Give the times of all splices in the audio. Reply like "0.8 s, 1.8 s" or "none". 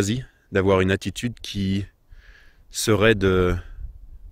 none